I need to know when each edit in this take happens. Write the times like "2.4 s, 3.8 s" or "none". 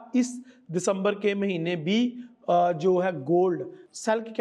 none